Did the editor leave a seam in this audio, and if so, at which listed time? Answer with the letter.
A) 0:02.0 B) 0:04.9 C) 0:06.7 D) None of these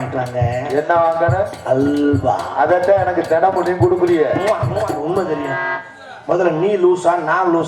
B